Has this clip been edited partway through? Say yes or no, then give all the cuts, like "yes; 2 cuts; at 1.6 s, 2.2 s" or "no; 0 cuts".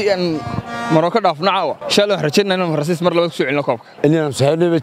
yes; 1 cut; at 1.8 s